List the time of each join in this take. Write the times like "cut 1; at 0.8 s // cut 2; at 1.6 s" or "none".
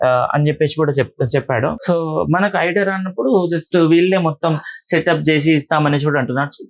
cut 1; at 1.8 s